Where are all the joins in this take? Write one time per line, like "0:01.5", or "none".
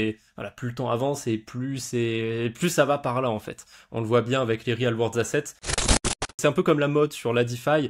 0:05.8